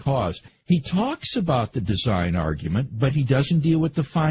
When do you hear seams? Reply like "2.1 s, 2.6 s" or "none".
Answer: 2.7 s